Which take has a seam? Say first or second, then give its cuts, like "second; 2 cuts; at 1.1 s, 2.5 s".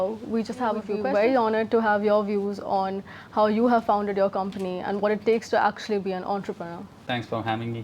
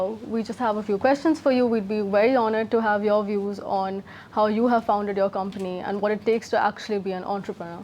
first; 1 cut; at 0.9 s